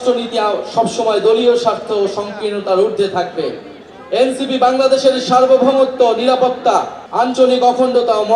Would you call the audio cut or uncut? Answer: cut